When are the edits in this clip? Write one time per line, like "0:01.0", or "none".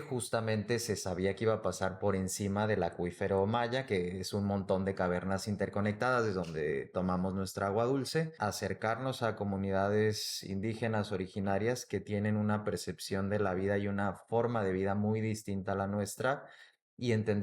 0:08.3